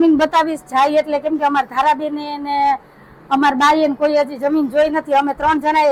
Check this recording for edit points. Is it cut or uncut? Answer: uncut